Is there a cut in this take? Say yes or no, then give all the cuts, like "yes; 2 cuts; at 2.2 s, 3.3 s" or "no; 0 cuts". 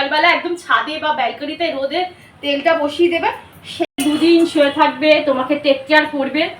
yes; 1 cut; at 3.8 s